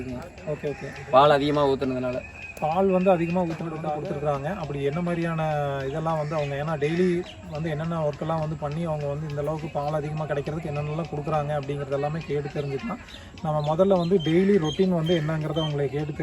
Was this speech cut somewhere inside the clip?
no; 0 cuts

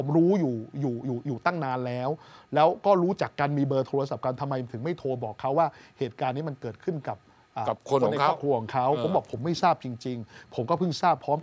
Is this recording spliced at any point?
no; 0 cuts

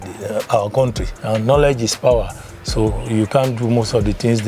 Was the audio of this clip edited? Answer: yes; 1 cut; at 1.1 s

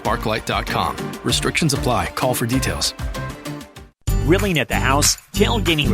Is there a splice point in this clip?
yes; 1 cut; at 3.9 s

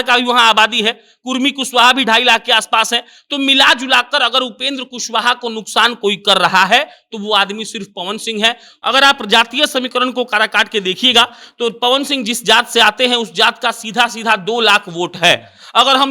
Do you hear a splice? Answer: yes; 1 cut; at 8.7 s

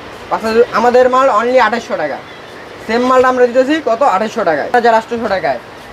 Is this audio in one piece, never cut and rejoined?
no; 1 cut; at 4.7 s

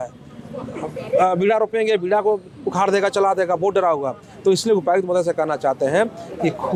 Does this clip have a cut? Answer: no; 0 cuts

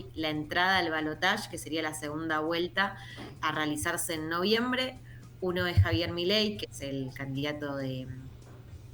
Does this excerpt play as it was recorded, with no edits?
yes; 0 cuts

